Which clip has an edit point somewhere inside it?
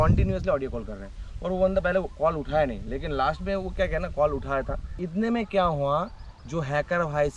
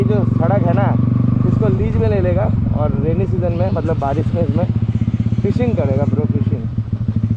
first; 1 cut; at 5.0 s

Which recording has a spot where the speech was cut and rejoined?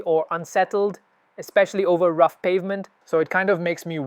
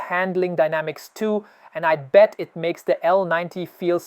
first; 1 cut; at 2.9 s

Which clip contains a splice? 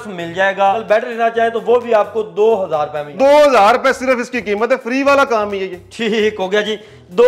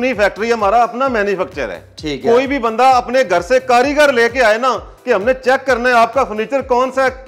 first; 2 cuts; at 0.8 s, 3.0 s

